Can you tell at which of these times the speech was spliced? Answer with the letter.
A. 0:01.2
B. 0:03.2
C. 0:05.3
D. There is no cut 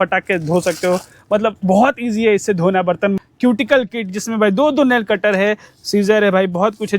B